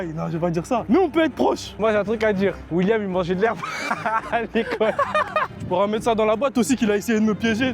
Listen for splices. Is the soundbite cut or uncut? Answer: cut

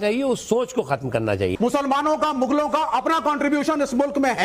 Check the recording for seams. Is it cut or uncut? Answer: cut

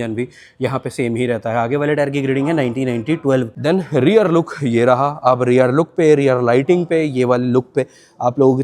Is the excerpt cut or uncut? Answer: cut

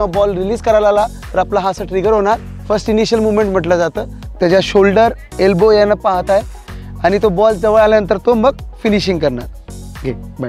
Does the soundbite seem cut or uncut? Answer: cut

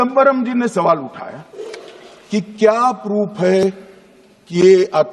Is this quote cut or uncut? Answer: uncut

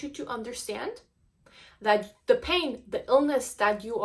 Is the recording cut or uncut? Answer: uncut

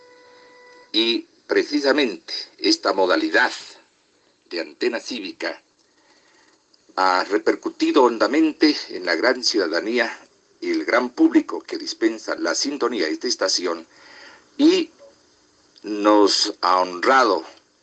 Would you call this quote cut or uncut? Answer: cut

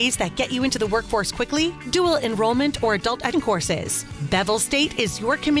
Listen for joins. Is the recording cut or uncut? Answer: cut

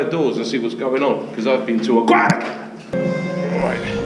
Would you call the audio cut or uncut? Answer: cut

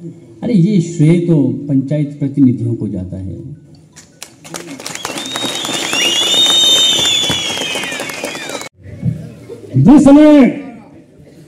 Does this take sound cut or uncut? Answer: cut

